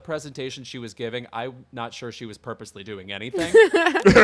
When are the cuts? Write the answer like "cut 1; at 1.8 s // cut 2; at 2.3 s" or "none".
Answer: cut 1; at 3.3 s